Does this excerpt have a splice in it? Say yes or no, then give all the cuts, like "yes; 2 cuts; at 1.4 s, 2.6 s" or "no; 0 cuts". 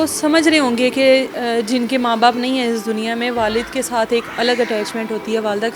no; 0 cuts